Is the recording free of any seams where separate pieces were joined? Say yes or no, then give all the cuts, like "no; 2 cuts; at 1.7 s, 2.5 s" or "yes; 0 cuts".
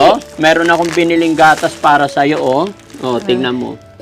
yes; 0 cuts